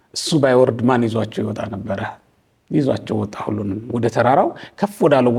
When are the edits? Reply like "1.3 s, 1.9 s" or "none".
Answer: none